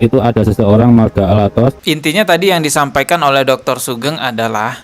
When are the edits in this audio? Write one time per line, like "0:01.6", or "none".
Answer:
0:01.9